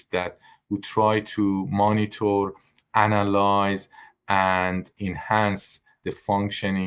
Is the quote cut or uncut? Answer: cut